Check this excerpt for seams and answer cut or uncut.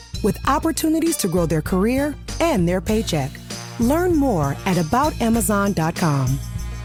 uncut